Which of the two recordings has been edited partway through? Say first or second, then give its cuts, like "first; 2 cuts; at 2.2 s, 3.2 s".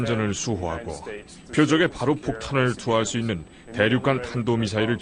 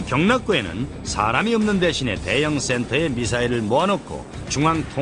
second; 1 cut; at 2.5 s